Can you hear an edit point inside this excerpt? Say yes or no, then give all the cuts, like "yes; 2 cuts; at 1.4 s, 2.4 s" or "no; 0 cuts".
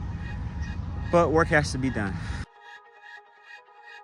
yes; 1 cut; at 2.3 s